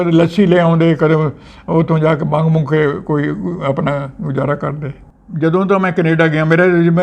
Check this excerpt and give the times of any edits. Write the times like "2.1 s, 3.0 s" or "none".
5.1 s